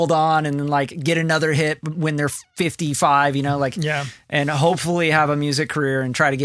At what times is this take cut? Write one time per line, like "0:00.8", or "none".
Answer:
none